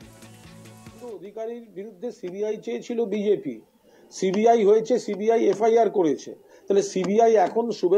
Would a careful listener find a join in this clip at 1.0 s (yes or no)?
yes